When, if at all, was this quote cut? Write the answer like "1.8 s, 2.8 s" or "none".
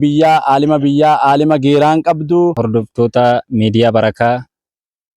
2.6 s